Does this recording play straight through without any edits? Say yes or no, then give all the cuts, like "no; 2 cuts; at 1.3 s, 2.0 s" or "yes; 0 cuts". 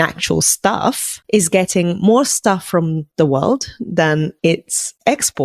no; 3 cuts; at 1.1 s, 3.0 s, 4.5 s